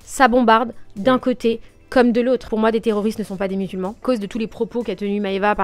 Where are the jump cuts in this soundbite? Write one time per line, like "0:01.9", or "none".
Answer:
0:02.5
0:04.0